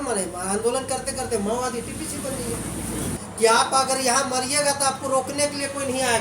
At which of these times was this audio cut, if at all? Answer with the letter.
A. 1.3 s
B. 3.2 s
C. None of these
B